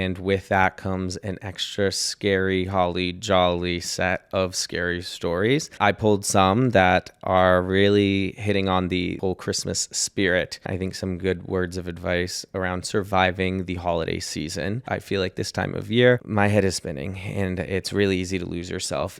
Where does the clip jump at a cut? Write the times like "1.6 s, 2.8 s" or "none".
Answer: 5.7 s, 9.2 s, 10.7 s, 14.8 s, 16.3 s